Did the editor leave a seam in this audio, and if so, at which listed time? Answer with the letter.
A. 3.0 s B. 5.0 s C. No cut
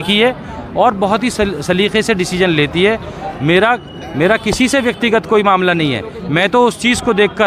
C